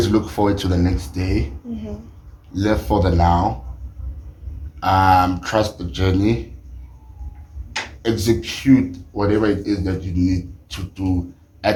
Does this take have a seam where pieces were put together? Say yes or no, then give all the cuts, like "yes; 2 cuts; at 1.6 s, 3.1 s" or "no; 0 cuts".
no; 0 cuts